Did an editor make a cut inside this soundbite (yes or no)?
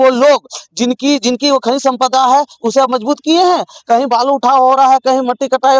no